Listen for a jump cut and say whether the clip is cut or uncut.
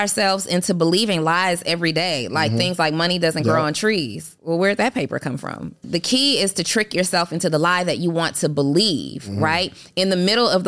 cut